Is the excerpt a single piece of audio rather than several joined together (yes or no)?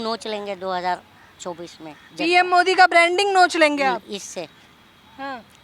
yes